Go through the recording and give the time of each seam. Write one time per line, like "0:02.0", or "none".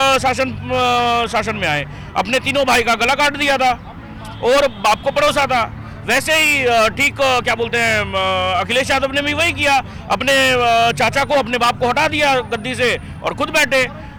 none